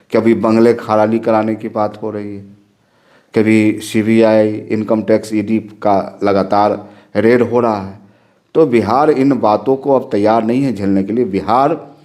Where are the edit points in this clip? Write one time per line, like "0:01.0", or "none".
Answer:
none